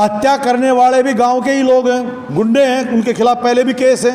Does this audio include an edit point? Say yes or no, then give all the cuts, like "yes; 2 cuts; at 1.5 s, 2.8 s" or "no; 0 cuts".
no; 0 cuts